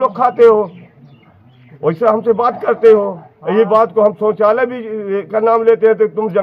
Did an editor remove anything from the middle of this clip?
no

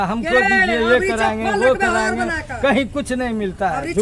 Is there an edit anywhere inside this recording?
no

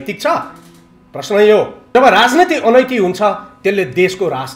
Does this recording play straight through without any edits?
no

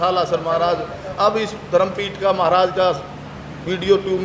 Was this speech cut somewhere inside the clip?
no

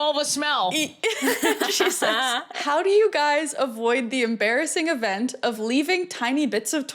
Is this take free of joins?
no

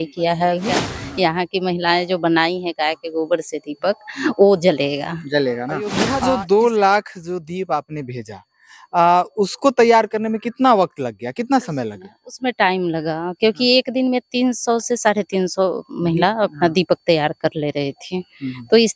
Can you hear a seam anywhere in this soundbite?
yes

